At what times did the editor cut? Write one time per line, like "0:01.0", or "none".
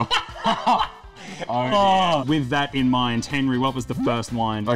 0:02.2